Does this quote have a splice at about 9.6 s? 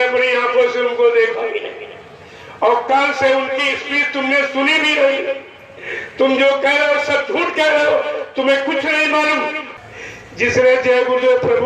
yes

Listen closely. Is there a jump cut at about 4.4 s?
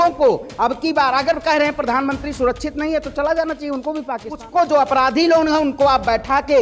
yes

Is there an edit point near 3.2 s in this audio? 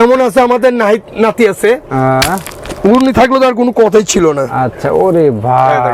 no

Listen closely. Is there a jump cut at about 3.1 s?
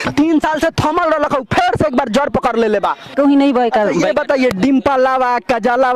yes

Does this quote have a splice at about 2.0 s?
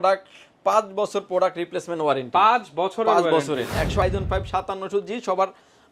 no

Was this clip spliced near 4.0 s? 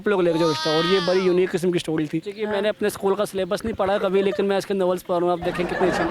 no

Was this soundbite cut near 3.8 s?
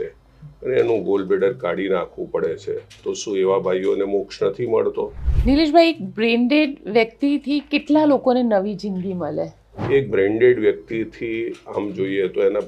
no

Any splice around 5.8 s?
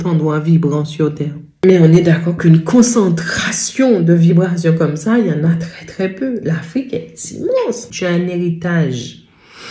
no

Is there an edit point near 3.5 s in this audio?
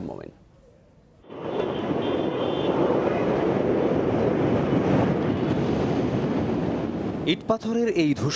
no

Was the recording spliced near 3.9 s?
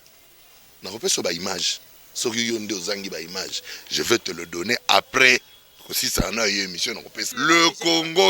no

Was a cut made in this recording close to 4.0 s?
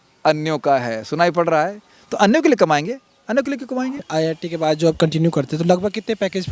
yes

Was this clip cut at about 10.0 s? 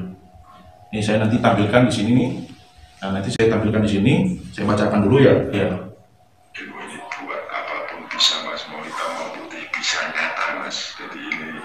no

